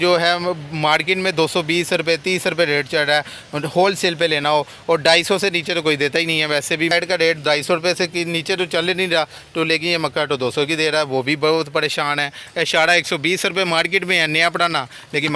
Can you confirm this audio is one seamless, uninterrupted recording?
yes; 0 cuts

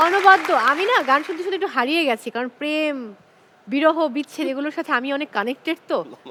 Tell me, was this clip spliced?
no; 0 cuts

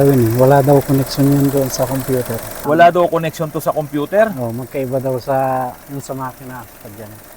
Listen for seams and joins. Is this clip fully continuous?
no; 1 cut; at 2.5 s

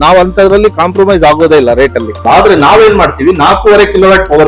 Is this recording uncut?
no; 1 cut; at 2.1 s

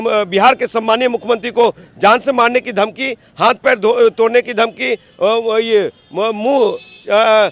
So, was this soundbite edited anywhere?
no; 0 cuts

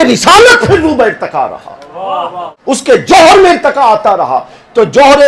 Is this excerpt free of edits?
no; 1 cut; at 2.5 s

